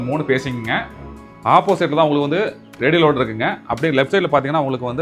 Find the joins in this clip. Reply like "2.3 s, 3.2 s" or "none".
1.1 s